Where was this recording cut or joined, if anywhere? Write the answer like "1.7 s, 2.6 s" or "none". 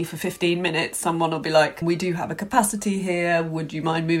1.8 s